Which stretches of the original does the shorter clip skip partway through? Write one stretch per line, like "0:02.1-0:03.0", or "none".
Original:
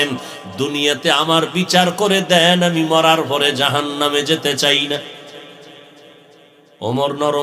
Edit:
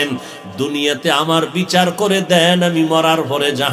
none